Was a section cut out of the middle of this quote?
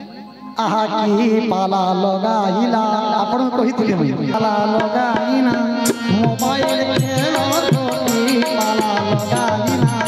yes; 1 cut; at 4.3 s

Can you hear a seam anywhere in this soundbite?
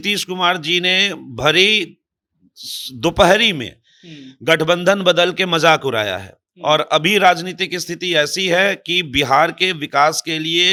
no; 0 cuts

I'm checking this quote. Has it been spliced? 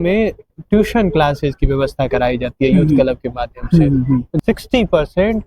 yes; 1 cut; at 4.3 s

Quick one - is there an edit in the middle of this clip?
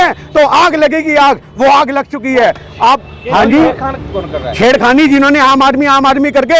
no; 0 cuts

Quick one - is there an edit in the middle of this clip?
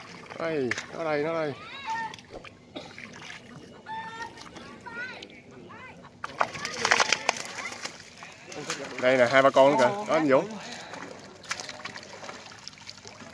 yes; 1 cut; at 8.7 s

